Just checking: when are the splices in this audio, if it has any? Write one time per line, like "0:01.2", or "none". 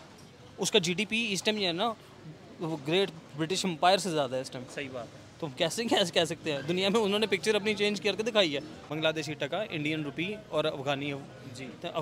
0:08.8